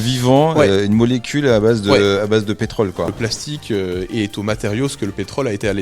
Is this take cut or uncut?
cut